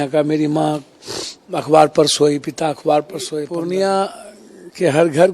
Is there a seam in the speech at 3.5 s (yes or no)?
yes